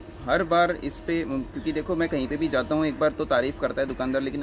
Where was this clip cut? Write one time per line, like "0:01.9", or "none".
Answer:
none